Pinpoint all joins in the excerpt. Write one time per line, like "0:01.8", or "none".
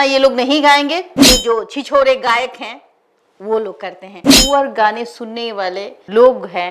0:01.1
0:04.3